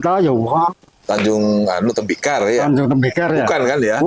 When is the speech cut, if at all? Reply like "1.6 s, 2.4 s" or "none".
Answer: 0.9 s